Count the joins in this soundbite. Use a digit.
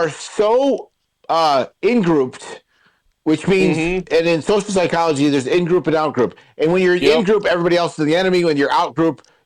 0